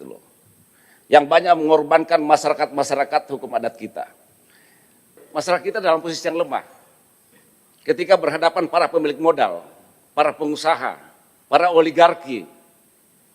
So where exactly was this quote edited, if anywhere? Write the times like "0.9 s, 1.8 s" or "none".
5.2 s